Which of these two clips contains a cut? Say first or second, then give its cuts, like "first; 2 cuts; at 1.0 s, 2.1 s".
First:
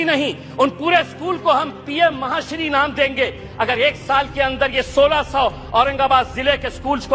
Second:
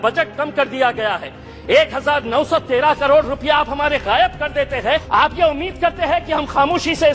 second; 1 cut; at 5.0 s